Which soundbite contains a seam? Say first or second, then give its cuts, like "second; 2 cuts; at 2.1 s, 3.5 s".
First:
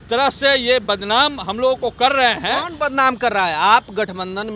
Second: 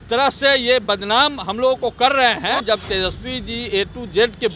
second; 1 cut; at 2.6 s